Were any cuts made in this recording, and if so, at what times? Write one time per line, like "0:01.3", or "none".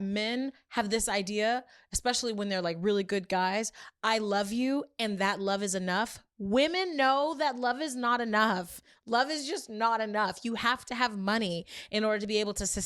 0:11.8